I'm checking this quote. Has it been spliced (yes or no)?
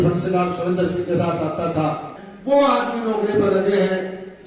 yes